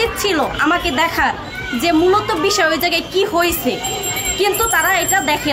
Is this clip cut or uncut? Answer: uncut